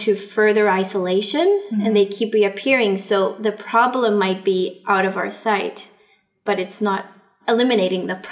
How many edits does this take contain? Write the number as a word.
one